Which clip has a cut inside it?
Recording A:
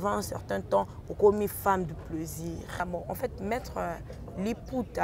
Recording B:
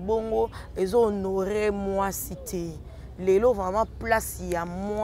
A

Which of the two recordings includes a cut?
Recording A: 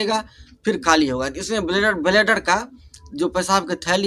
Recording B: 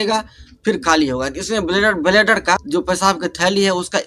B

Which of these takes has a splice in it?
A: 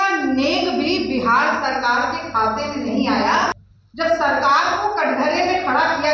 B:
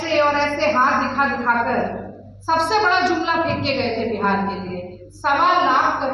A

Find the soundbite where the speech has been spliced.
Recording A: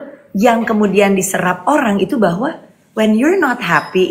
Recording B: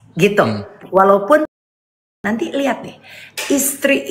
B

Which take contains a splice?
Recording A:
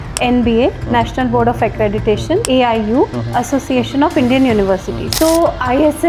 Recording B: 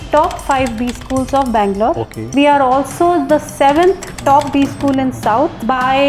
B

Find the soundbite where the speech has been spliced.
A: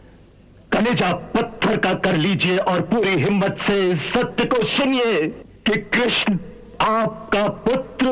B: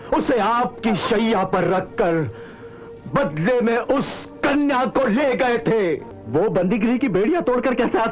A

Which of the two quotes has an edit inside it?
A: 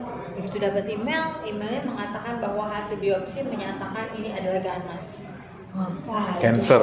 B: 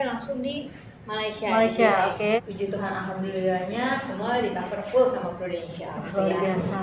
B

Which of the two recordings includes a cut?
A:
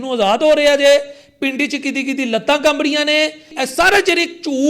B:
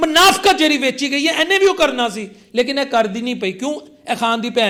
A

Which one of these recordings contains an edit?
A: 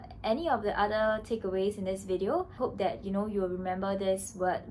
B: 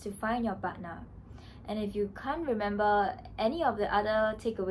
A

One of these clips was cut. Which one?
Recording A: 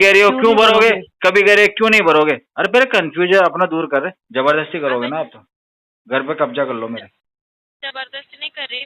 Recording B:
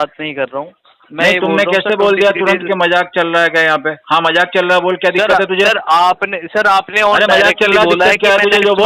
A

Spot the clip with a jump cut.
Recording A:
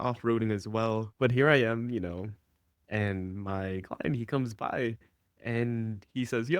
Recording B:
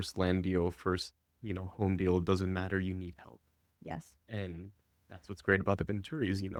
A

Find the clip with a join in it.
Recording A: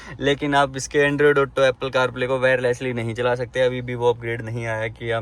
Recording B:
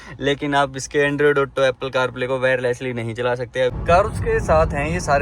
B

